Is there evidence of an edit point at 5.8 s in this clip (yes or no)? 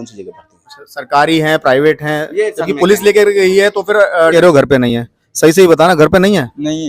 no